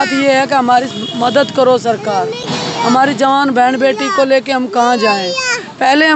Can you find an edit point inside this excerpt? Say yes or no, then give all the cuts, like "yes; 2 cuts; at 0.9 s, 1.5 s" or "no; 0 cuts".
no; 0 cuts